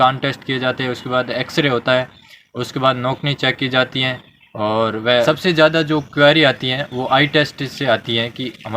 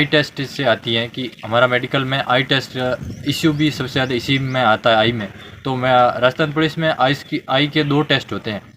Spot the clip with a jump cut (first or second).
first